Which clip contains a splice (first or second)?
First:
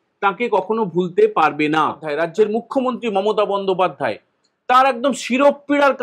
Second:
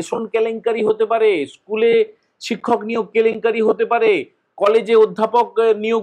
first